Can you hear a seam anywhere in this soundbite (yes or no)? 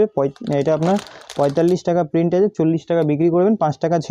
no